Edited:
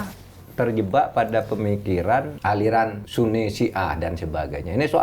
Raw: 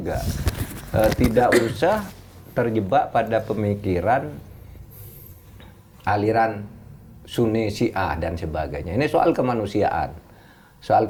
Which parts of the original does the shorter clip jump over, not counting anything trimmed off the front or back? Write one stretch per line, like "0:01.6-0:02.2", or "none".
0:04.3-0:06.0
0:06.6-0:07.2